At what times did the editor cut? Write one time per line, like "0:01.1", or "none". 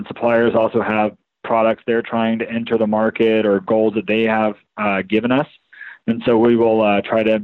none